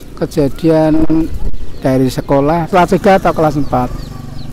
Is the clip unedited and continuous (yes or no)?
no